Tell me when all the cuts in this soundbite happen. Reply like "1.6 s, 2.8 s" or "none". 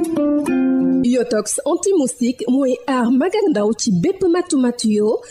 0.9 s